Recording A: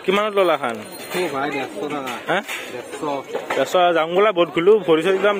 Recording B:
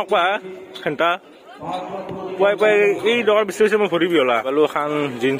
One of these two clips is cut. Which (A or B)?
B